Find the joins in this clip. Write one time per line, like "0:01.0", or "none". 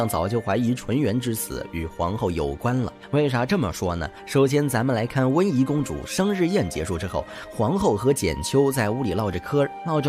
0:03.0
0:04.1